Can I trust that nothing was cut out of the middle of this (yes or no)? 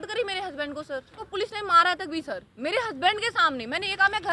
no